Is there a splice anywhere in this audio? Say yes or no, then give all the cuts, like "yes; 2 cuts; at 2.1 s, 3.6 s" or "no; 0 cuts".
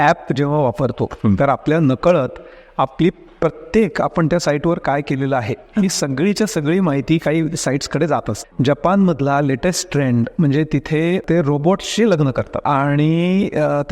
yes; 3 cuts; at 8.4 s, 11.2 s, 12.5 s